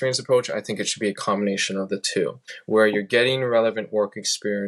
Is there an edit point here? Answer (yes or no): yes